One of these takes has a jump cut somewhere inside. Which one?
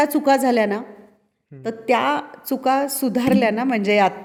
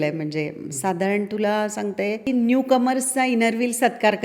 second; 1 cut; at 2.3 s

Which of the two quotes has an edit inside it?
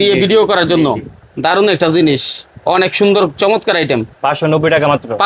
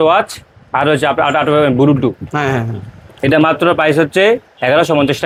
first; 1 cut; at 4.1 s

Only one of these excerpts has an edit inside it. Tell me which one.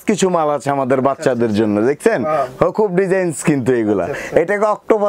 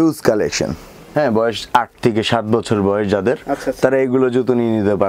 second; 1 cut; at 0.9 s

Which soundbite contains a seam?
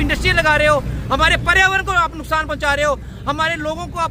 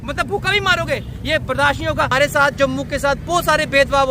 second; 1 cut; at 2.1 s

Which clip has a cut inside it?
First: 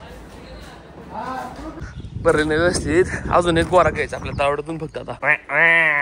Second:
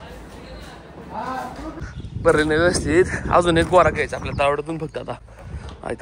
first; 1 cut; at 5.1 s

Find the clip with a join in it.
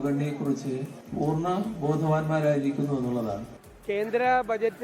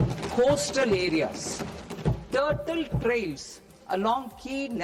first; 1 cut; at 3.5 s

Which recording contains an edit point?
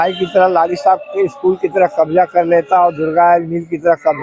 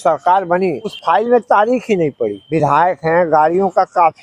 second; 2 cuts; at 1.0 s, 2.4 s

